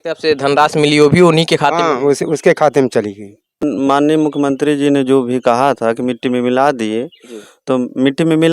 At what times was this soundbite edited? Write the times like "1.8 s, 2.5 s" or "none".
3.6 s